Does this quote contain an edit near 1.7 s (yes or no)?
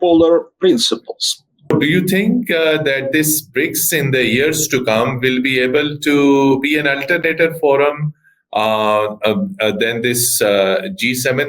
yes